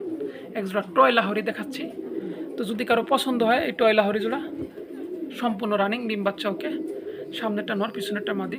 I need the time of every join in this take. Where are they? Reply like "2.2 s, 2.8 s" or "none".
none